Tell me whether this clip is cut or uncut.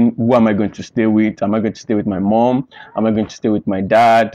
uncut